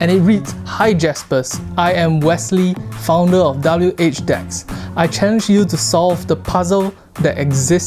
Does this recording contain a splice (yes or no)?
no